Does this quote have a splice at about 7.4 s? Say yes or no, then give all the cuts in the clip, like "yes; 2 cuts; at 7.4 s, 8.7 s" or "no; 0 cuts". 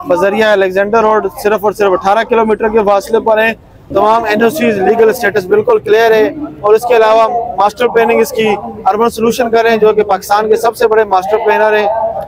no; 1 cut; at 3.9 s